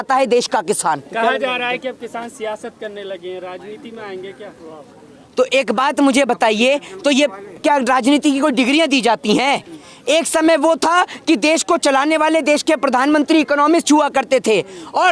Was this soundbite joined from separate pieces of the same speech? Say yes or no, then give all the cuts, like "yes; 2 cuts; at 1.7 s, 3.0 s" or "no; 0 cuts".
no; 0 cuts